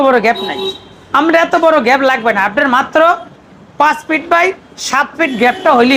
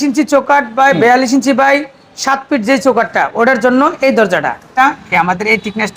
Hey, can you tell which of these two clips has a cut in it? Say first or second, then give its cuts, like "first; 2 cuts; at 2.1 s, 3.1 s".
second; 1 cut; at 4.7 s